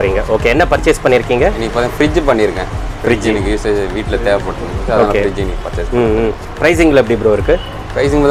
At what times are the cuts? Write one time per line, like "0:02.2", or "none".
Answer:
none

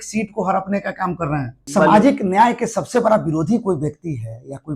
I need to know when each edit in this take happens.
0:01.6

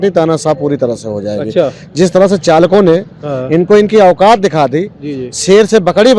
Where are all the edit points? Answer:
none

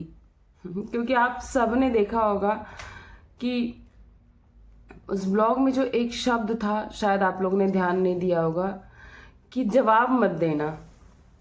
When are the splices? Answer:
none

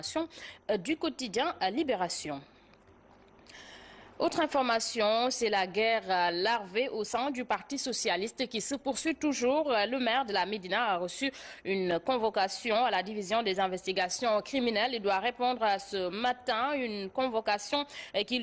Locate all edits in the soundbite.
0:17.1

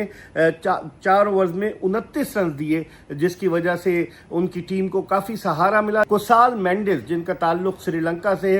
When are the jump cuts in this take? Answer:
0:06.1

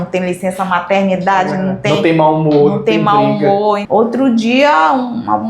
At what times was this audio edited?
0:03.8

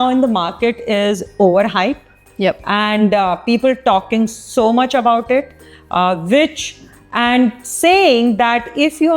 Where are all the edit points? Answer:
none

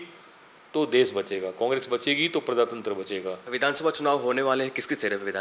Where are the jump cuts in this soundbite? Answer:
0:03.5

